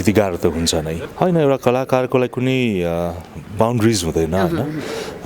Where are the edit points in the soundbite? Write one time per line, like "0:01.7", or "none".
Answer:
0:01.0